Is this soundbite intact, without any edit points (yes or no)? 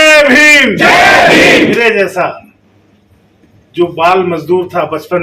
no